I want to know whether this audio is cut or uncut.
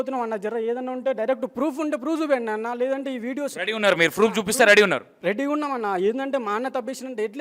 uncut